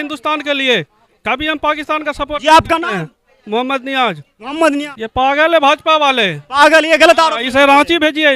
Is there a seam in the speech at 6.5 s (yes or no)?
no